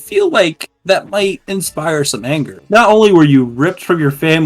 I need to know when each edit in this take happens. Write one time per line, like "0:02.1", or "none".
0:02.6